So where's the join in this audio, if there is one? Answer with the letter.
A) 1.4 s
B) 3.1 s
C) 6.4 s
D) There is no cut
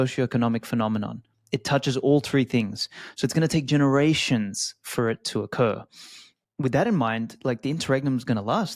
C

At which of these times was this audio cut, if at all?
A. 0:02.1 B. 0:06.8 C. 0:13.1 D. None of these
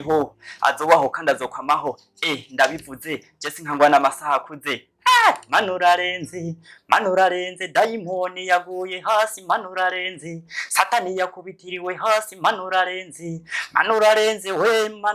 D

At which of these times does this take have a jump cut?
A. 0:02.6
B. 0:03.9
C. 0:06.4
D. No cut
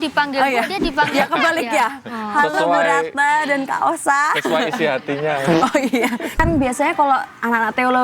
C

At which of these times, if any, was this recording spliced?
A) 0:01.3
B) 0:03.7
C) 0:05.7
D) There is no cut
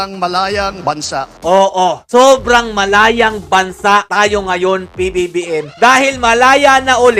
A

